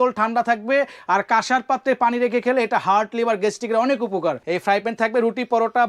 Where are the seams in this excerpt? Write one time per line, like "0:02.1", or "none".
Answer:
0:04.4